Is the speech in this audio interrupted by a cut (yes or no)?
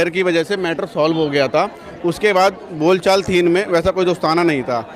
no